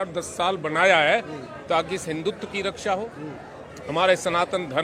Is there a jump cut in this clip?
no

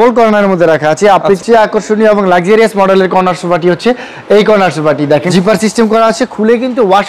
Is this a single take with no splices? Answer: no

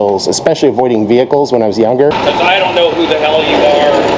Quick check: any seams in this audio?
yes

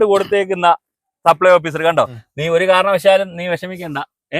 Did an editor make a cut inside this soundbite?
yes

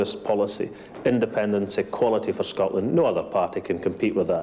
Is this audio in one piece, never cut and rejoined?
yes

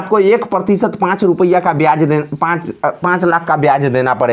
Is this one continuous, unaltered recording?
yes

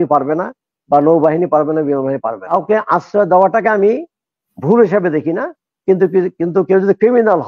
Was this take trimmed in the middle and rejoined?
yes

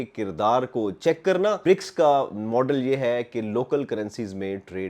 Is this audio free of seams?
no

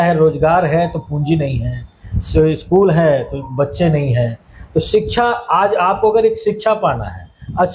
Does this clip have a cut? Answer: no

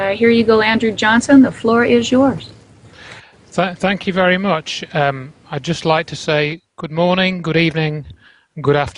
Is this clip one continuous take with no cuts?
no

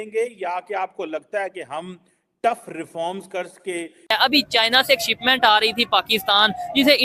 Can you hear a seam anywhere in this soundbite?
yes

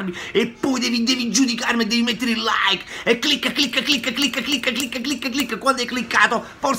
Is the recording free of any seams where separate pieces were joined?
yes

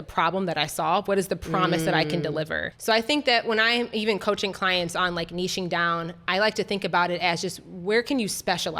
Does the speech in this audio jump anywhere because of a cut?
no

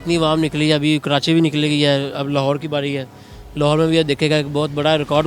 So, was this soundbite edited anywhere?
no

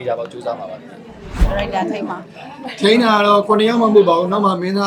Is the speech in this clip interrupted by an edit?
no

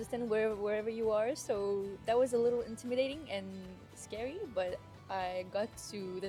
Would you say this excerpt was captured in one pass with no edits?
yes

